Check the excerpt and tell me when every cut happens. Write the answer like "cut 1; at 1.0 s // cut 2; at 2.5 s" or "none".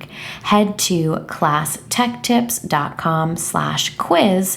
none